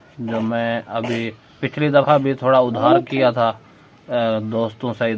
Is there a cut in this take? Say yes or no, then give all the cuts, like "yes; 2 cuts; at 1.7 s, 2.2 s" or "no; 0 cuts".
no; 0 cuts